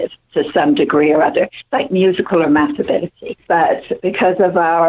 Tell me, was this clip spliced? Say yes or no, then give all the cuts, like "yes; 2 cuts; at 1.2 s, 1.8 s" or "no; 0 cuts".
yes; 1 cut; at 3.4 s